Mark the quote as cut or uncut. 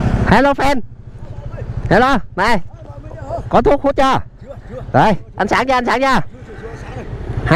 uncut